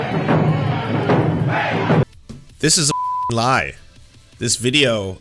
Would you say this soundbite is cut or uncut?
cut